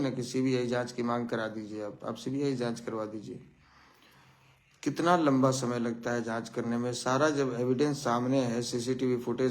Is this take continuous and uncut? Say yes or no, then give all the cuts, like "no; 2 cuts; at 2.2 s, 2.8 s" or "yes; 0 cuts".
yes; 0 cuts